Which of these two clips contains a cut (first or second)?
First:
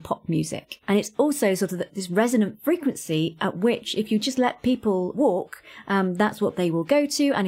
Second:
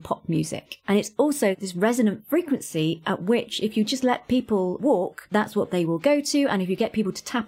second